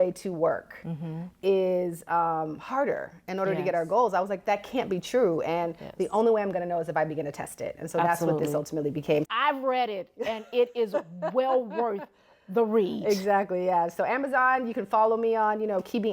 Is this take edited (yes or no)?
yes